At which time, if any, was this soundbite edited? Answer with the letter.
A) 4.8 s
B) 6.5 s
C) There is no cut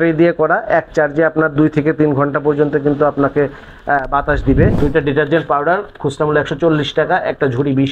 A